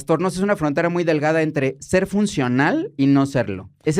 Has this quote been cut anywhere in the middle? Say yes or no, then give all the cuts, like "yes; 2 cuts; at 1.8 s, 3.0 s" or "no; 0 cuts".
no; 0 cuts